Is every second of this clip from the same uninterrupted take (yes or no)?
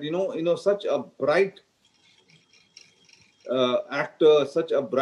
yes